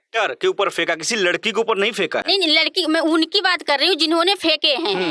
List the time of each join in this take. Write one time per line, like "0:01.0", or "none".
none